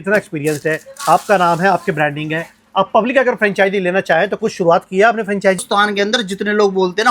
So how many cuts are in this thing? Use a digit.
1